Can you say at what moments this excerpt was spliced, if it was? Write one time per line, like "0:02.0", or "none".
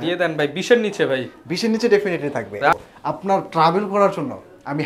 0:02.7